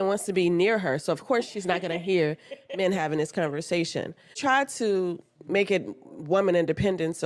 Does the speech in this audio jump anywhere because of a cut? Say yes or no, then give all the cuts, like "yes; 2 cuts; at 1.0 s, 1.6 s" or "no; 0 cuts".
yes; 1 cut; at 4.4 s